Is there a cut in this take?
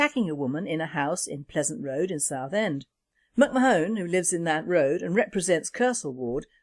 no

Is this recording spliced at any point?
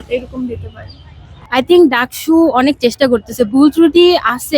yes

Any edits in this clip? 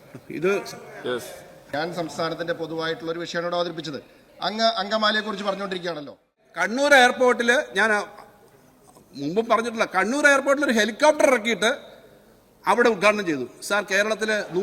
yes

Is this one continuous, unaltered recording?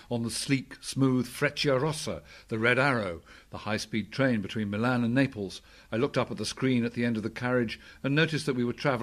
yes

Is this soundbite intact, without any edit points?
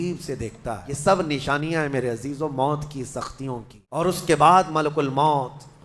no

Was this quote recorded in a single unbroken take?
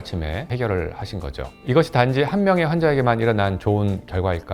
yes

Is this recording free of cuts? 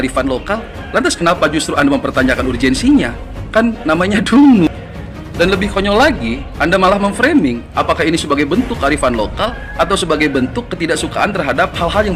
yes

